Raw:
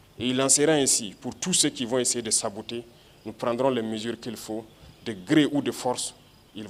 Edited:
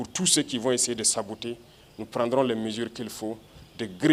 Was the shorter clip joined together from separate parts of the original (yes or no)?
no